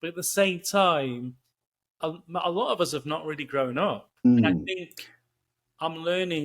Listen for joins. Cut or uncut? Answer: cut